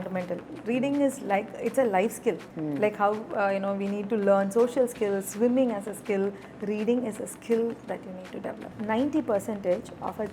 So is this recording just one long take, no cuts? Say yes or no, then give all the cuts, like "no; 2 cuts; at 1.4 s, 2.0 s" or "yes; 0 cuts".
no; 2 cuts; at 2.5 s, 8.7 s